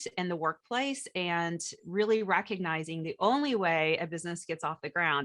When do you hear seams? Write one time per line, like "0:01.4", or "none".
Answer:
none